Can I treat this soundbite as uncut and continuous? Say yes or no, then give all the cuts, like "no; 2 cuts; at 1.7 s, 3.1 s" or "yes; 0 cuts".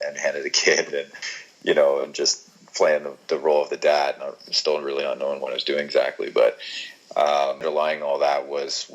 no; 1 cut; at 7.6 s